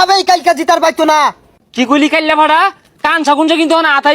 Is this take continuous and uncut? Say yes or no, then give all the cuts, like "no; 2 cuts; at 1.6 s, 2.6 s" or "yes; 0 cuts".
no; 1 cut; at 1.5 s